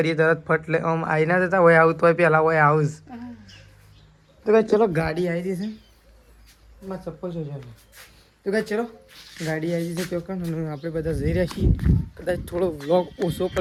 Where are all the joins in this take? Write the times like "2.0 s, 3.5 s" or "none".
none